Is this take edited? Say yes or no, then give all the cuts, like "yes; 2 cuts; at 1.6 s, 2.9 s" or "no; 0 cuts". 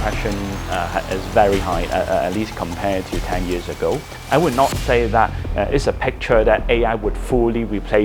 yes; 1 cut; at 4.1 s